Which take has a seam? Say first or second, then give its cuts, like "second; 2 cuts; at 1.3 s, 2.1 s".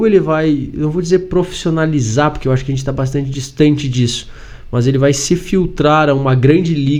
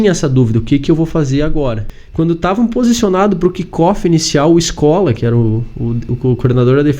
second; 1 cut; at 1.9 s